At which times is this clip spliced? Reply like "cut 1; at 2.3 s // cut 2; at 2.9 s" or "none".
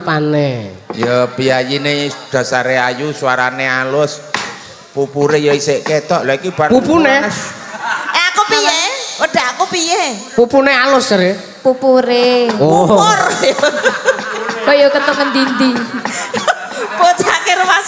none